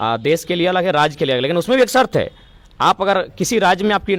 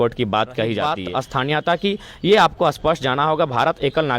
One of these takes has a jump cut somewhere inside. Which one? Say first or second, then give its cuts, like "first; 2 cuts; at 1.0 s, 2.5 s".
second; 1 cut; at 1.0 s